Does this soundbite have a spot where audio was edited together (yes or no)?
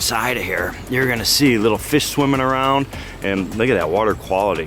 no